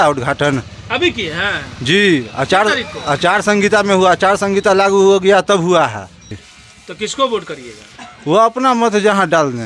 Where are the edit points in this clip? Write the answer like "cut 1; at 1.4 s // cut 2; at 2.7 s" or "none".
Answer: cut 1; at 6.5 s